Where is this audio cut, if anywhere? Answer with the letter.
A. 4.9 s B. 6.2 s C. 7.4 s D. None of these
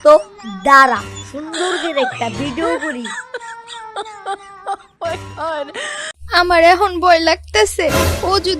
B